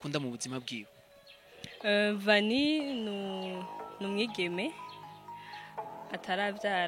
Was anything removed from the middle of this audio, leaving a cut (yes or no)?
no